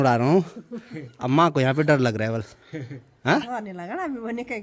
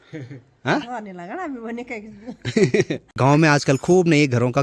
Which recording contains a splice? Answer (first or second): second